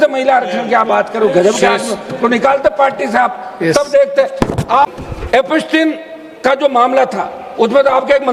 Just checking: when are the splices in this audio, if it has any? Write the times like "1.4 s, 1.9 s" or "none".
4.9 s